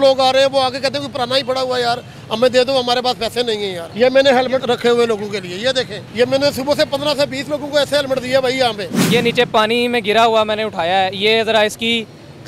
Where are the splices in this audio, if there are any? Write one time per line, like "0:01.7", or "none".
0:03.8
0:04.6
0:06.0
0:08.9